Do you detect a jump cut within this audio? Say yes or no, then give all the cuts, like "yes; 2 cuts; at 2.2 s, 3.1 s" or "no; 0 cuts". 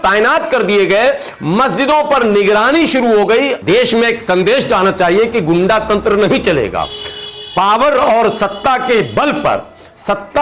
yes; 1 cut; at 3.6 s